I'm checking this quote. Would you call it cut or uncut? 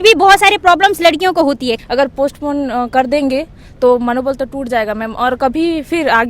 cut